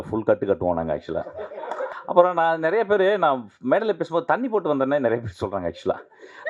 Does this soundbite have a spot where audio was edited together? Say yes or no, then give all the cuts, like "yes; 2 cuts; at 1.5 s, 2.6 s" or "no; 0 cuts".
yes; 1 cut; at 1.9 s